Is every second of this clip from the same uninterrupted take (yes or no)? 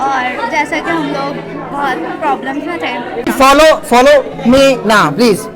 no